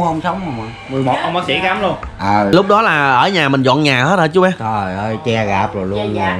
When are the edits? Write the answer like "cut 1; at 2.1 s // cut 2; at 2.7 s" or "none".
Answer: cut 1; at 2.5 s